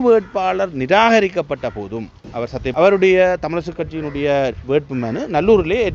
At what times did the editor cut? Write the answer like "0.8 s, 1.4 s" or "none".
2.7 s